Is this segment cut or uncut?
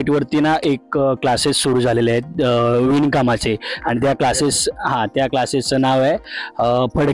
uncut